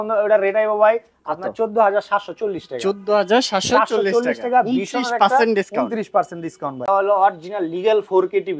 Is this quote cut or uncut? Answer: cut